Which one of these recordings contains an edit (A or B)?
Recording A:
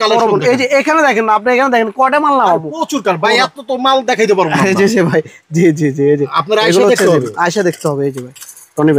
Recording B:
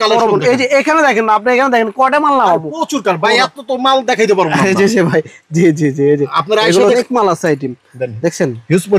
B